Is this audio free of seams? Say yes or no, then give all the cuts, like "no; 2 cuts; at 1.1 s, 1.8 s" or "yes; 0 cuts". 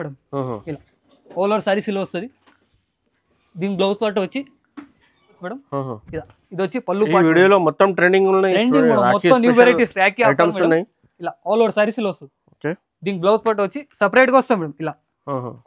no; 1 cut; at 5.4 s